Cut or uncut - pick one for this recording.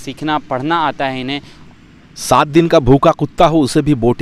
cut